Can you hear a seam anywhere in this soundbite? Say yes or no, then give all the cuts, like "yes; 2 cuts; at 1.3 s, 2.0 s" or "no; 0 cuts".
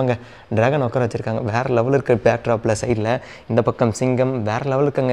no; 0 cuts